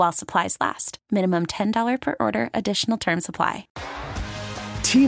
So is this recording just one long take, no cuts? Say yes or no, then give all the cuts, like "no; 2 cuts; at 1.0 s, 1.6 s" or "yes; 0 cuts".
no; 1 cut; at 3.7 s